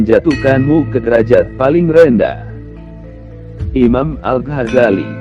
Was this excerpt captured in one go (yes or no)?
yes